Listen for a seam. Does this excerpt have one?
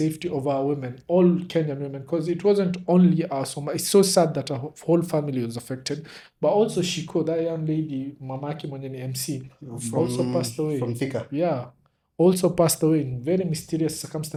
no; 0 cuts

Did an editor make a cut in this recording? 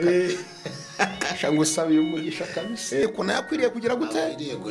yes; 1 cut; at 3.0 s

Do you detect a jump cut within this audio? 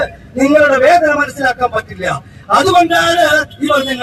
no; 0 cuts

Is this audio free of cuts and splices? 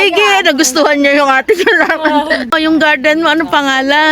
no; 1 cut; at 2.5 s

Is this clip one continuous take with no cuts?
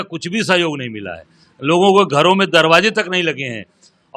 yes; 0 cuts

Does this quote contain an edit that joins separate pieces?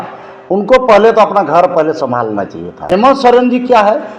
yes; 1 cut; at 2.9 s

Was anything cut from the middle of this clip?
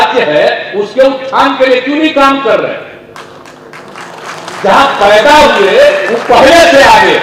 no; 0 cuts

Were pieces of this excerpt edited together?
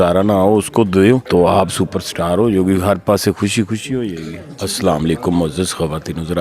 yes; 2 cuts; at 1.2 s, 4.4 s

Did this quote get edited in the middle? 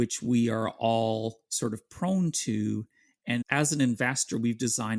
yes; 1 cut; at 3.5 s

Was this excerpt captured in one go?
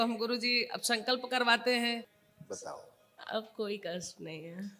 no; 1 cut; at 2.2 s

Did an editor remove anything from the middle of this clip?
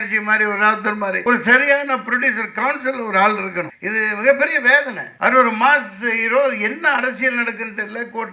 yes; 3 cuts; at 1.2 s, 3.8 s, 5.0 s

